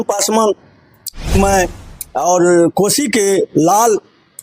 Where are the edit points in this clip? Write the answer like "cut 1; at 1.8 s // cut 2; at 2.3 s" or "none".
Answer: cut 1; at 1.3 s